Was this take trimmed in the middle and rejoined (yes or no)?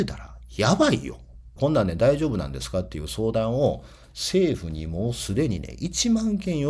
yes